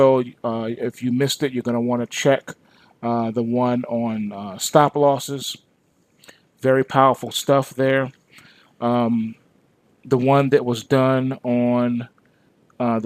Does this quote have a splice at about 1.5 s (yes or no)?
no